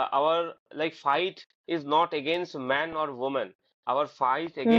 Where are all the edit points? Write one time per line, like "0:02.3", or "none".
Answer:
none